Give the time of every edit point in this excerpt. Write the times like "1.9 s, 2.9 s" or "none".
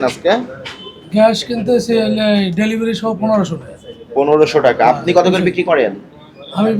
none